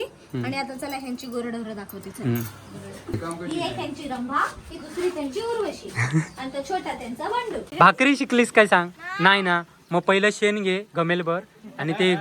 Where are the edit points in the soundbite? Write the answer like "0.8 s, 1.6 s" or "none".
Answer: 3.0 s, 7.6 s

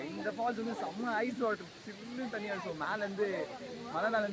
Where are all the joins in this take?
none

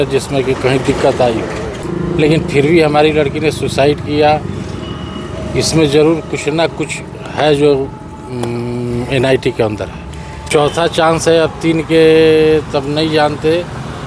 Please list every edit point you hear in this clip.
1.8 s, 10.5 s

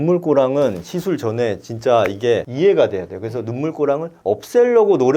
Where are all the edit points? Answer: 2.5 s, 4.1 s

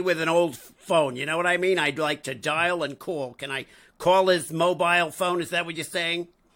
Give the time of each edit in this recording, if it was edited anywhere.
none

